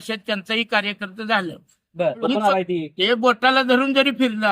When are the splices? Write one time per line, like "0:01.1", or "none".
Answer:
0:02.3